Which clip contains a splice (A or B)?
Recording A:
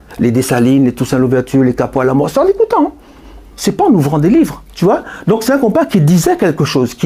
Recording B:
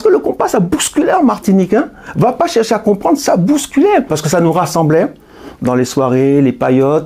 B